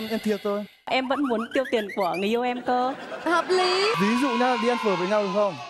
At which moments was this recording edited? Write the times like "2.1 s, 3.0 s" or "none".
0.9 s, 4.0 s